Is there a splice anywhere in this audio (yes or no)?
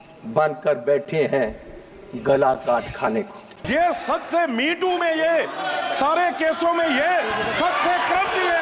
yes